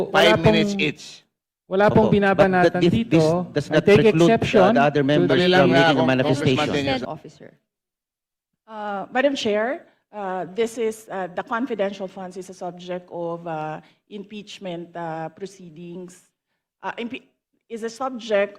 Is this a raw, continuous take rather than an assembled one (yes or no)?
no